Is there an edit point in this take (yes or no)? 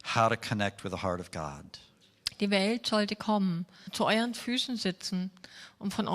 yes